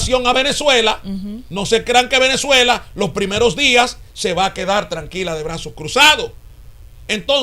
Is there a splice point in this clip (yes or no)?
no